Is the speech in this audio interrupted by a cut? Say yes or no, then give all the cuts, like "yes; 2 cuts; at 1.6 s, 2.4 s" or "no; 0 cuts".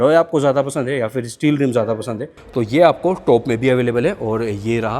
yes; 1 cut; at 2.4 s